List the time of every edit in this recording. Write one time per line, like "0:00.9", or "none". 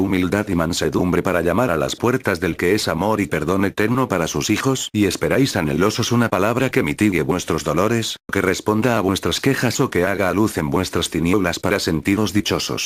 none

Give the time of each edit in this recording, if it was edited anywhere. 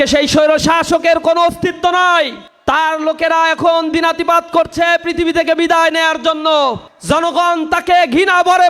0:02.4
0:06.9

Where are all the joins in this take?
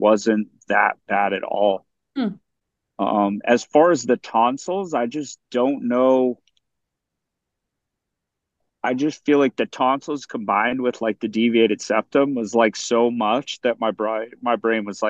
none

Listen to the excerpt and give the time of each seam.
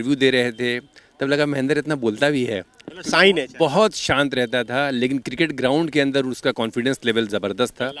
none

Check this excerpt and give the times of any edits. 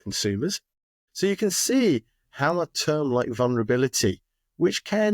0:00.9

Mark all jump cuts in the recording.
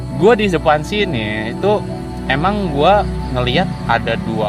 none

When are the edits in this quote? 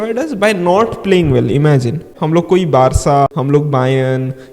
0:02.1
0:03.3

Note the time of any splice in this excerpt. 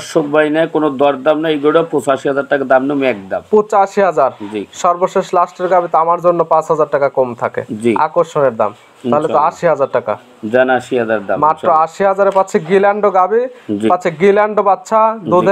none

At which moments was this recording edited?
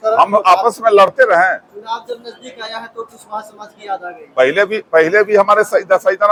none

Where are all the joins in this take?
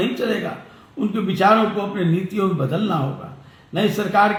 none

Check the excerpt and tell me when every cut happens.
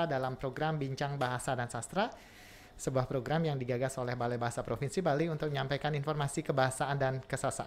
none

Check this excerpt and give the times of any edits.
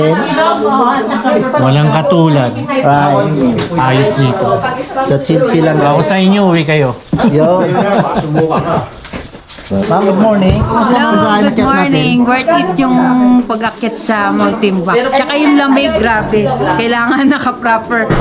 0:09.8

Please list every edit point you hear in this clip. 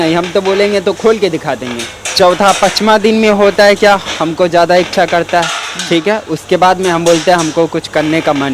0:02.0

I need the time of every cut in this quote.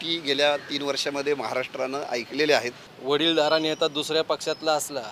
0:02.8

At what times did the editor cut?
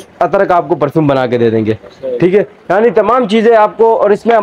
none

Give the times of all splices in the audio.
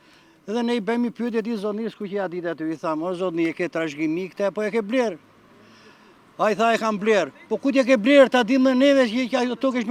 none

